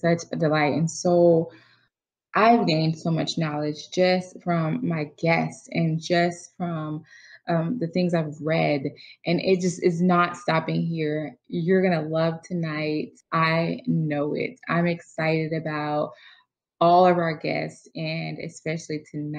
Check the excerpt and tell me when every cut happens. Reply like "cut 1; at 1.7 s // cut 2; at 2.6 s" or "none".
none

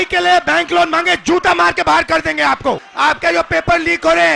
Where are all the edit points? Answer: cut 1; at 2.9 s

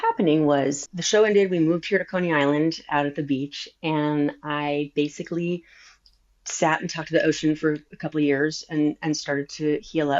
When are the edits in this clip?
cut 1; at 1.0 s

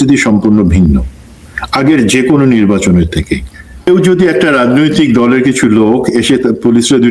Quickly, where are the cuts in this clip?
cut 1; at 3.9 s

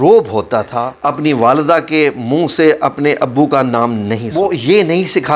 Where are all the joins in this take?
cut 1; at 0.9 s // cut 2; at 4.3 s

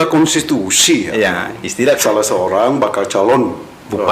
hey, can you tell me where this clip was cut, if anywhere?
cut 1; at 2.0 s

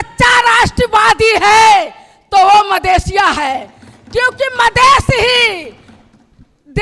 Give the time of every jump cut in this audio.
none

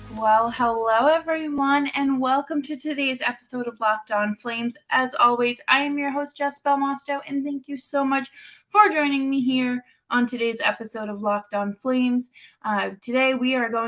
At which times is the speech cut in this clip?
none

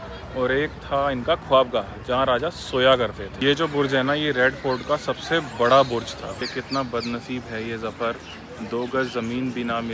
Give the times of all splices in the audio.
cut 1; at 3.3 s // cut 2; at 6.4 s

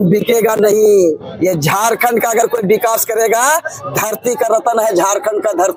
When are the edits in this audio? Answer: none

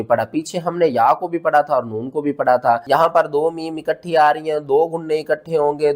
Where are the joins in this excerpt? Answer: cut 1; at 2.8 s

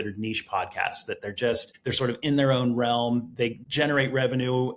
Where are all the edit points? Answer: cut 1; at 1.7 s // cut 2; at 3.6 s

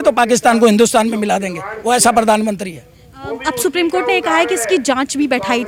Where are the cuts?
none

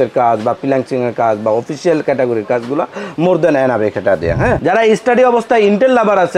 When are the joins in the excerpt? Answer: cut 1; at 4.6 s

